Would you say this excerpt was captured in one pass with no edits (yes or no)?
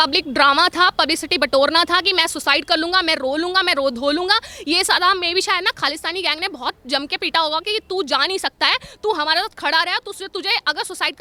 yes